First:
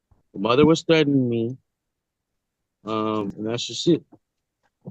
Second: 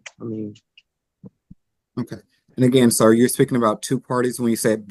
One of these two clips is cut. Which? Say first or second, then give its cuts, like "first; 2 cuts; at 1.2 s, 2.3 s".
first; 1 cut; at 3.3 s